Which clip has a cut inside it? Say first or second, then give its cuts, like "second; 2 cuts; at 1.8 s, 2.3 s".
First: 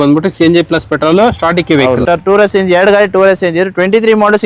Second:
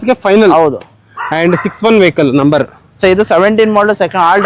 first; 1 cut; at 2.0 s